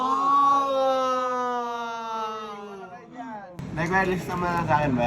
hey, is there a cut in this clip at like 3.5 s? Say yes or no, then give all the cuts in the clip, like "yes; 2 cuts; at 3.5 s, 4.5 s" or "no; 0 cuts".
yes; 1 cut; at 3.5 s